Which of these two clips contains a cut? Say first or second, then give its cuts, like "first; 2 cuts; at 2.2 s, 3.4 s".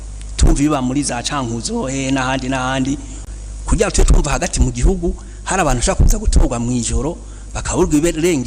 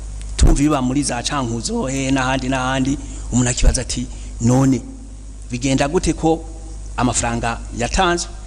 first; 1 cut; at 3.1 s